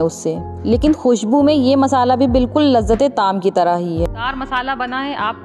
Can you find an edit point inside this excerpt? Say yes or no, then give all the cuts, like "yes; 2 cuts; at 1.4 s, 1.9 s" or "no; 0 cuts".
yes; 1 cut; at 4.2 s